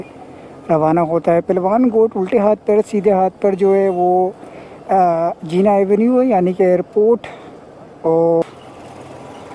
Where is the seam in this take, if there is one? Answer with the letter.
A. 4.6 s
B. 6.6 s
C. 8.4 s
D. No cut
C